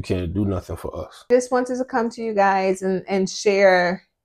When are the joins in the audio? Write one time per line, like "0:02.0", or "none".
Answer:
0:01.3